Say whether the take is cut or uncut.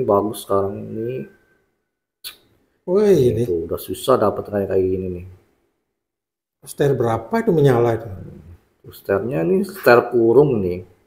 uncut